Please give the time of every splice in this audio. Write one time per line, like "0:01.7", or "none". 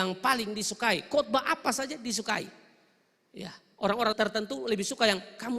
0:04.1